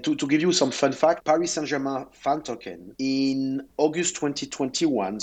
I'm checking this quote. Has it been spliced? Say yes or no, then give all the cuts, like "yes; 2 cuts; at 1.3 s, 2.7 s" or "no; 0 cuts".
yes; 1 cut; at 1.2 s